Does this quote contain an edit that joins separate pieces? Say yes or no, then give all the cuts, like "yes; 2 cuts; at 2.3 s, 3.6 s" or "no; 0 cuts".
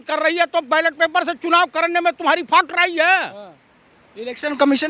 no; 0 cuts